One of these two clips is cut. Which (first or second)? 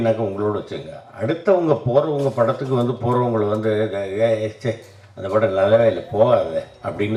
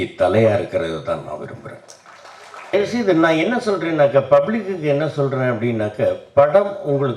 second